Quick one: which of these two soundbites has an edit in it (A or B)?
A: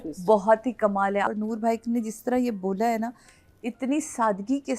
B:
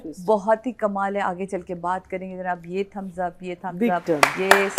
A